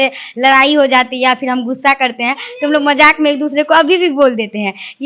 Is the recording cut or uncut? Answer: uncut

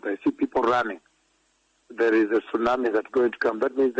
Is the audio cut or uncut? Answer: cut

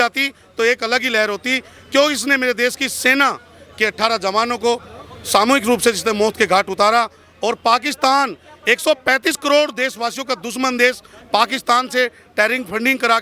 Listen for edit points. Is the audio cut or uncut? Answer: uncut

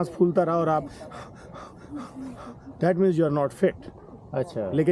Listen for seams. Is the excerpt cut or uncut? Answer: uncut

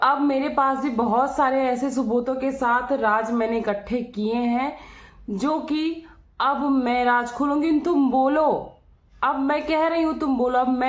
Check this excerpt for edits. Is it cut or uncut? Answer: uncut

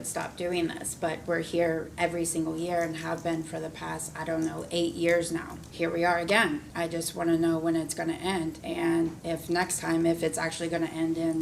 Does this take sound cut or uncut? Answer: cut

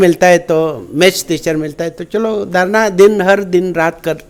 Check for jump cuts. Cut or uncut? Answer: uncut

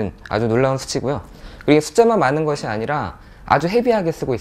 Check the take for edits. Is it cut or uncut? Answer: cut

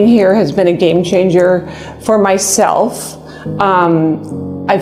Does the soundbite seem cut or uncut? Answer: uncut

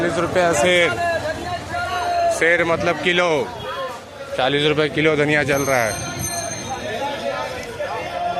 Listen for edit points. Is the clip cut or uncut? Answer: uncut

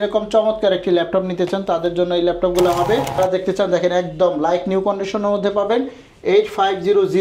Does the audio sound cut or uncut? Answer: cut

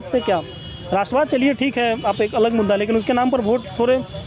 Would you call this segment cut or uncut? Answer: uncut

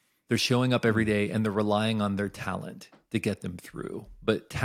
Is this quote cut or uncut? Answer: uncut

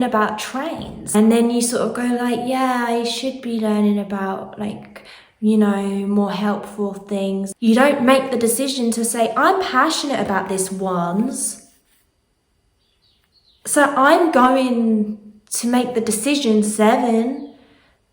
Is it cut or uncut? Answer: cut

